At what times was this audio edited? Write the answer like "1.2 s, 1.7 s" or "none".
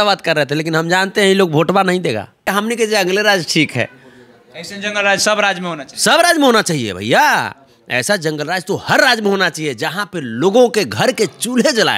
2.4 s